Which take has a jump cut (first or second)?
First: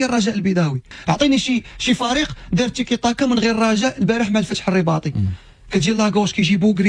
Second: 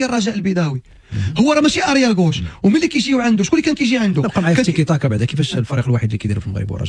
first